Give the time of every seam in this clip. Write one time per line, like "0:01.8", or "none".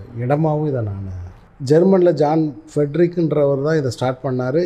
0:01.5